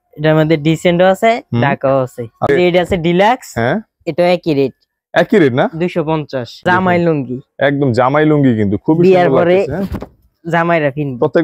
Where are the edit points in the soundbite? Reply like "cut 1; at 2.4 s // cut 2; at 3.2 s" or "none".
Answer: cut 1; at 2.5 s // cut 2; at 6.6 s